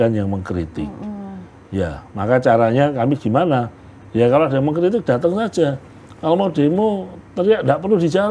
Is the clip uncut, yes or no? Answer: yes